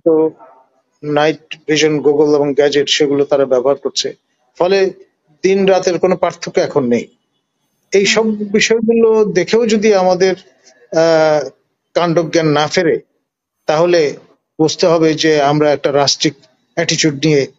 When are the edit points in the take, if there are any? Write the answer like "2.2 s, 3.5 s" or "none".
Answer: none